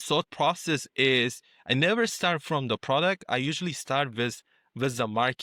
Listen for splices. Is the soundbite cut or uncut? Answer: uncut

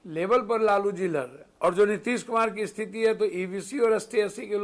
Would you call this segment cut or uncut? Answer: cut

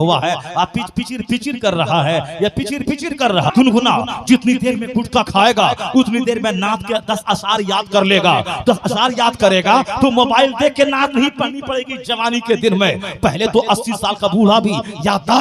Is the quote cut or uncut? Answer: cut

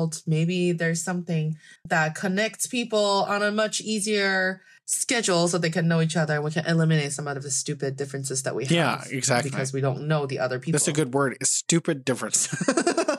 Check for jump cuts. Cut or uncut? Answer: cut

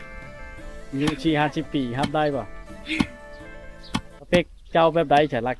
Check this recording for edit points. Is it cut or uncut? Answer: cut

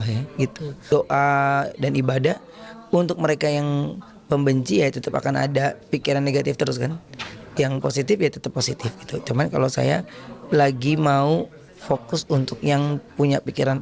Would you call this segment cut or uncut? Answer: cut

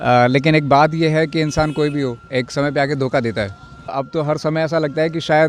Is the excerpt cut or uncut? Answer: cut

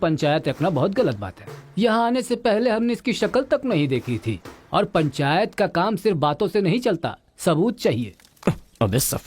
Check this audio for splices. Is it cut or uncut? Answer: uncut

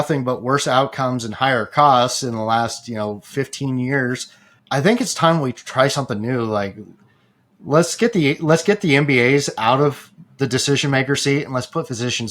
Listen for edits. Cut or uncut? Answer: cut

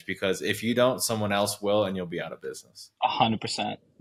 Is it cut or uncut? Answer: uncut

